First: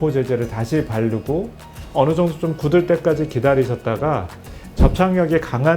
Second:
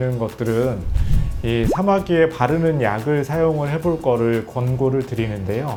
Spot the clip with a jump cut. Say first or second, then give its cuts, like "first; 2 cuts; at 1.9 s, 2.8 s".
first; 1 cut; at 1.8 s